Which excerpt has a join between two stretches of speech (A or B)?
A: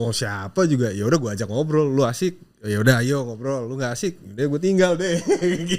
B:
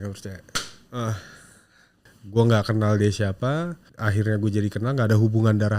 B